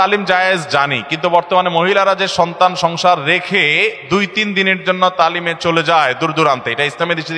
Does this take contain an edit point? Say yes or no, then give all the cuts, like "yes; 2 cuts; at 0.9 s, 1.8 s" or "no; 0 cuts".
no; 0 cuts